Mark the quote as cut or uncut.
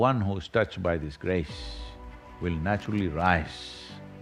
uncut